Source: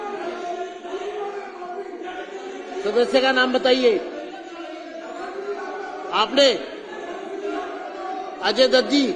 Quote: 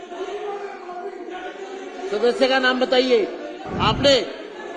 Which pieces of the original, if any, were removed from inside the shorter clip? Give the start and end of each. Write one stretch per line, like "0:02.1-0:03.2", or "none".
0:04.3-0:05.9